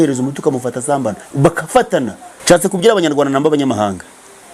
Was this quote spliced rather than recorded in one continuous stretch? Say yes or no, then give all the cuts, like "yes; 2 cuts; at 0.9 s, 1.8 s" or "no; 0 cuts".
yes; 1 cut; at 2.3 s